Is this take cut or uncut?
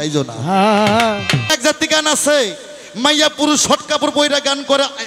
cut